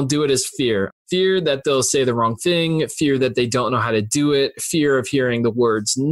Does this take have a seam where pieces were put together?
yes; 1 cut; at 0.9 s

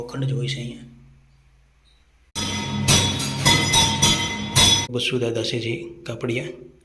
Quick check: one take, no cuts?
no; 2 cuts; at 2.4 s, 4.8 s

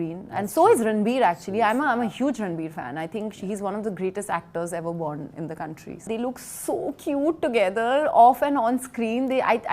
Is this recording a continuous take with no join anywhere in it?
no; 1 cut; at 6.1 s

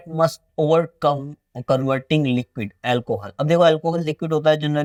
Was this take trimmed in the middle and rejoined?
no; 0 cuts

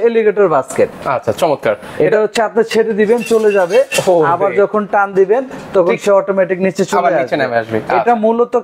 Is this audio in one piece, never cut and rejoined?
yes; 0 cuts

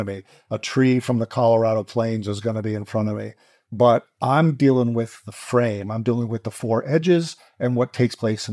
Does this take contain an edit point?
no; 0 cuts

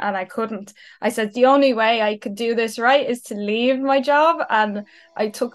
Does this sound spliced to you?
no; 0 cuts

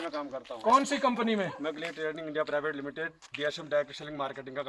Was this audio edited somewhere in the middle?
no; 0 cuts

